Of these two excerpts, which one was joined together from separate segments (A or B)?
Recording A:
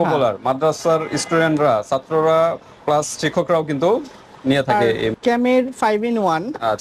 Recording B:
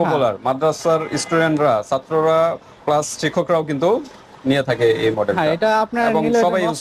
A